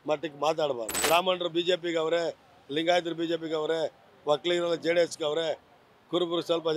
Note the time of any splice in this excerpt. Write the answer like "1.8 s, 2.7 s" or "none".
0.9 s